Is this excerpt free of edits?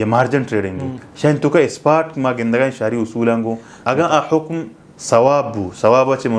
no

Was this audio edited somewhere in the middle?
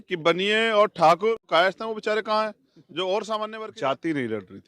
yes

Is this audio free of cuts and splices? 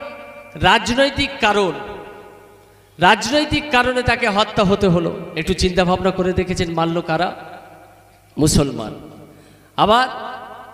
no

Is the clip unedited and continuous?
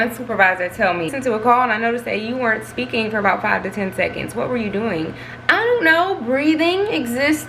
no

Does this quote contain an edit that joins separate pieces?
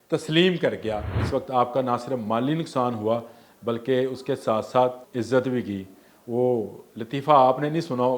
yes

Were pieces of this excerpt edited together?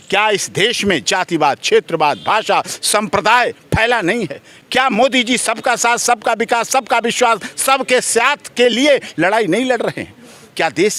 no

